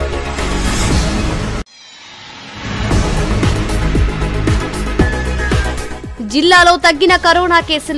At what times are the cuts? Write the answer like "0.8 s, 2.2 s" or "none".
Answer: 1.5 s